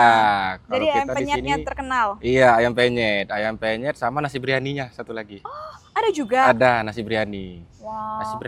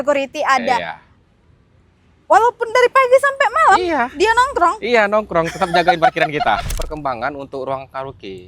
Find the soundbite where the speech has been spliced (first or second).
second